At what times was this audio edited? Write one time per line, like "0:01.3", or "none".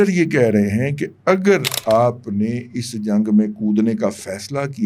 none